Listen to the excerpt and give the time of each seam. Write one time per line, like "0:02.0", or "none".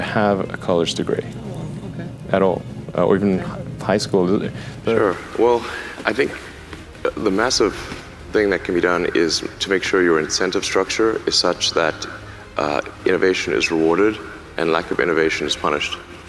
0:05.0